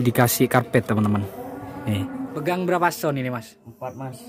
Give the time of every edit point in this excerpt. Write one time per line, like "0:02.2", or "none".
0:02.4